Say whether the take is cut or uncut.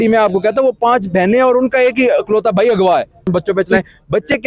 cut